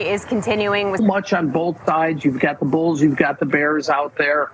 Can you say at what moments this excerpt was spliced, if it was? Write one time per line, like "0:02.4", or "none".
0:01.0